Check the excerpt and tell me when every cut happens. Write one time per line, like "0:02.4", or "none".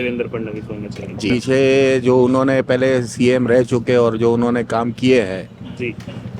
0:01.3